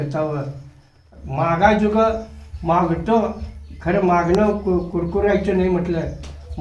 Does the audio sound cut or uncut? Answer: uncut